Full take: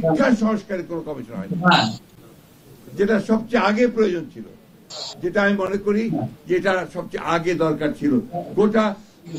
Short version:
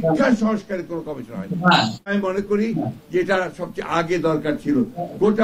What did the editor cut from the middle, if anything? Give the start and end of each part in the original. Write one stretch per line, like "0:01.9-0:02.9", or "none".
0:02.3-0:05.7